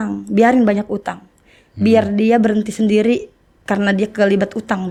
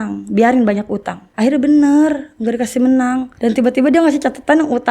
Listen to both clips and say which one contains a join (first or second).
second